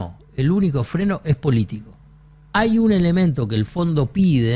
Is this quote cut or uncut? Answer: uncut